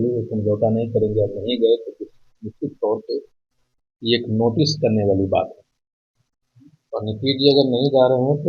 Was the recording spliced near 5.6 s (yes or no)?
no